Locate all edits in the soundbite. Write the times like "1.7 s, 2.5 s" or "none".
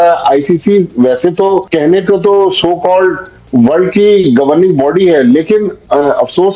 none